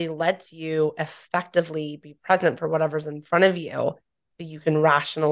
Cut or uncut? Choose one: uncut